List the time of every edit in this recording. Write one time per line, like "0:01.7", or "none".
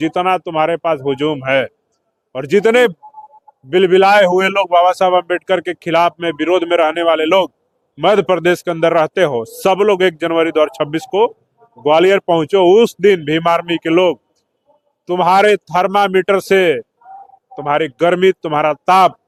none